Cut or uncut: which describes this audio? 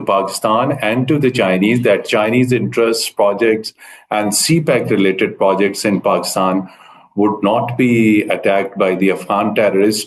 uncut